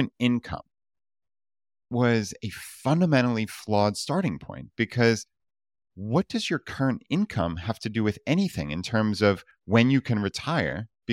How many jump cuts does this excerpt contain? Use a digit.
1